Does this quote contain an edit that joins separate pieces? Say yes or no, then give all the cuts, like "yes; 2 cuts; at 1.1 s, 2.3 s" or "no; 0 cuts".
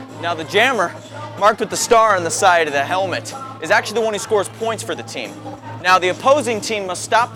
no; 0 cuts